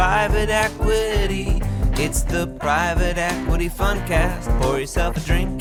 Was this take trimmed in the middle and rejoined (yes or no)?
no